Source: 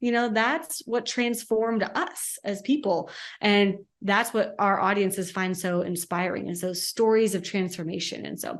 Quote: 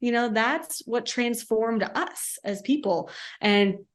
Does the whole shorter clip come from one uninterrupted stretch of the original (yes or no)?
yes